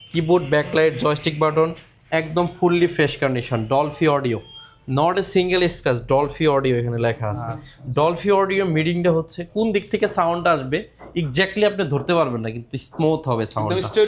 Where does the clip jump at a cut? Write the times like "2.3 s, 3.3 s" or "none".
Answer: none